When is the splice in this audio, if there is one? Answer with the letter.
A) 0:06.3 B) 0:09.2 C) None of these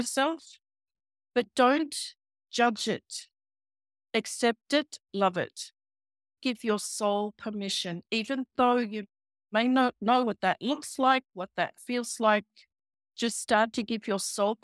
A